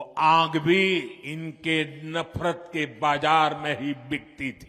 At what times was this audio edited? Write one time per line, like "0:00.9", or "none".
0:01.2

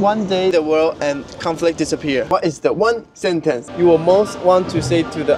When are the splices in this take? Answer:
none

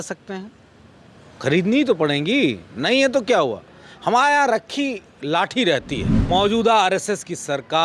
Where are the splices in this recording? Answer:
0:06.1

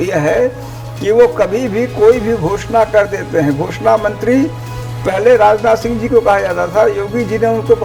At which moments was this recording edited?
none

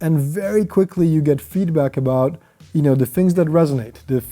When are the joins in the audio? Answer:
none

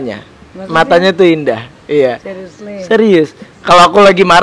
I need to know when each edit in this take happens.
0:03.5

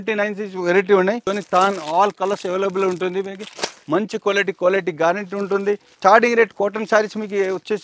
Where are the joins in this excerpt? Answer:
0:01.3
0:05.9

